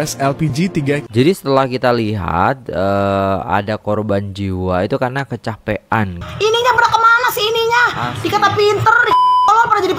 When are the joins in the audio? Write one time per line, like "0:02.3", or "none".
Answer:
0:06.2